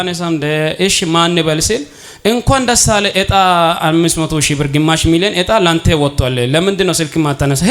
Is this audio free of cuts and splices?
yes; 0 cuts

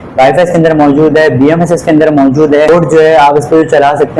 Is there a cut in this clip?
yes; 1 cut; at 2.7 s

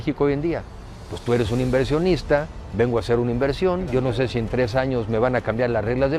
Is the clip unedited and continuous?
yes; 0 cuts

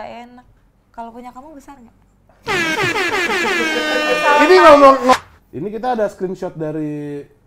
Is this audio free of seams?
no; 1 cut; at 5.1 s

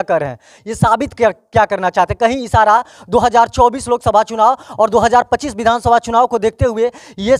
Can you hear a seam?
no; 0 cuts

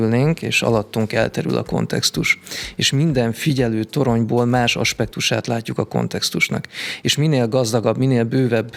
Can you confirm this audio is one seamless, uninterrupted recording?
yes; 0 cuts

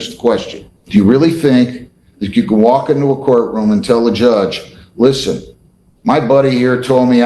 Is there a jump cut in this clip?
no; 0 cuts

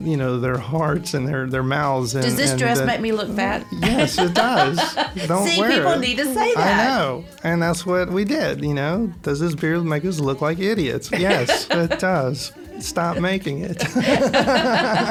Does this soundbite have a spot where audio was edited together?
no; 0 cuts

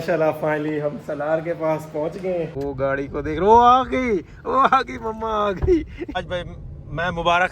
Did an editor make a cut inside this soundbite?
yes; 2 cuts; at 2.5 s, 6.2 s

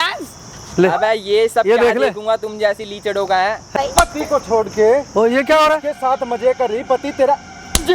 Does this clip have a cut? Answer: yes; 1 cut; at 3.7 s

